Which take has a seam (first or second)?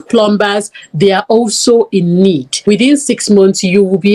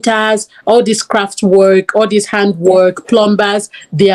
first